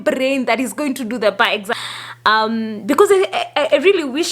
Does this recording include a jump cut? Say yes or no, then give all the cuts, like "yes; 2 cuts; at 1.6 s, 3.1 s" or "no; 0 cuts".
yes; 1 cut; at 1.8 s